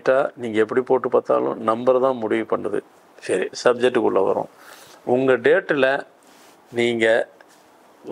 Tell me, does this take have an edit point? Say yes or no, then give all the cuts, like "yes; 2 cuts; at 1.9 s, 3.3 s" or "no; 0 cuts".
no; 0 cuts